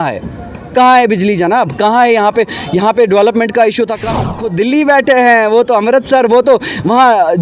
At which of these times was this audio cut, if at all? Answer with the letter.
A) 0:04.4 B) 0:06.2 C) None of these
A